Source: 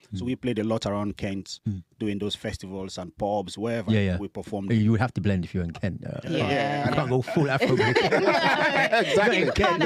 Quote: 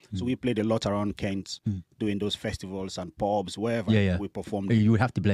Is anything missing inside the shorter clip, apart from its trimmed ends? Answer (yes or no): no